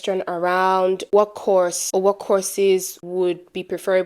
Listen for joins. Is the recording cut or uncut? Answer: cut